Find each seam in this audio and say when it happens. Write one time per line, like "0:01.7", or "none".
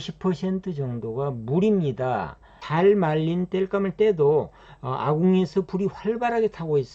0:02.6